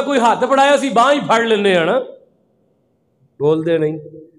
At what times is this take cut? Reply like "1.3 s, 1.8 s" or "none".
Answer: none